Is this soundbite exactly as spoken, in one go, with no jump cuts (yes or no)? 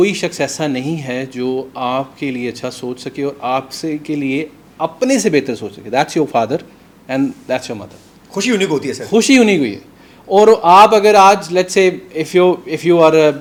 yes